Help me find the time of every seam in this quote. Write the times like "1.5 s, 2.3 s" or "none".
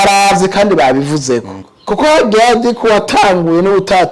1.7 s